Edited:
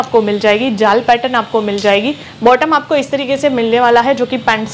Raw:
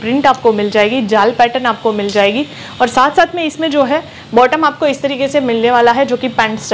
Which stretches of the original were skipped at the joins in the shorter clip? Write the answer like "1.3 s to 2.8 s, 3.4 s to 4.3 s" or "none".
2.6 s to 4.2 s